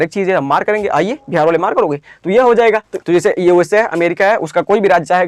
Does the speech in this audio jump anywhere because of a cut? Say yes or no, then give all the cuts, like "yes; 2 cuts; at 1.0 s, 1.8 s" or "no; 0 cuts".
yes; 1 cut; at 2.9 s